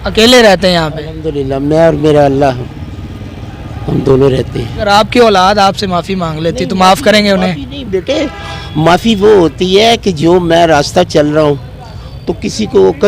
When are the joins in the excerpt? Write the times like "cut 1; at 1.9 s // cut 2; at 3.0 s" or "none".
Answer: cut 1; at 4.6 s